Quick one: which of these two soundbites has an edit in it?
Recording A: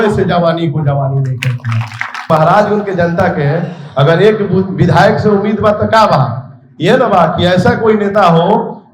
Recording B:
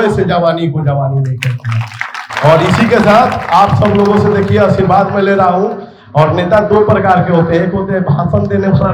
A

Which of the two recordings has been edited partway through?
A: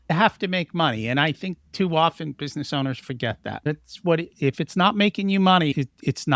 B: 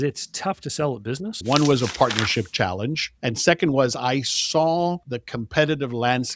B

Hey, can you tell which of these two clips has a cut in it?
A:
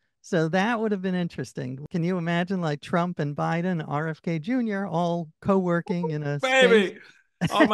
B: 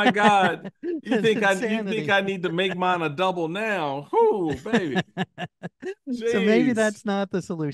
A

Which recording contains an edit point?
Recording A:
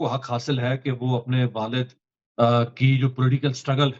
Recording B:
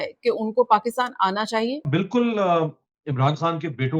B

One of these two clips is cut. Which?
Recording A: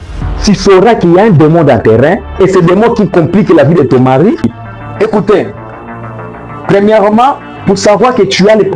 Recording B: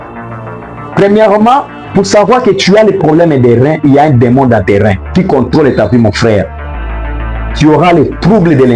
A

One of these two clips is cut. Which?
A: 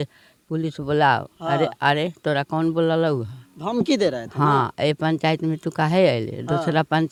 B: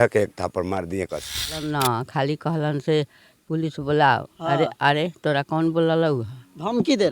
B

